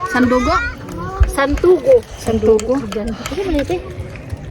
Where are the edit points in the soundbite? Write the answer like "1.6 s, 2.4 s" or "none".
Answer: none